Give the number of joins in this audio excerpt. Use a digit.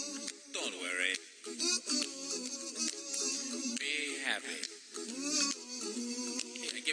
1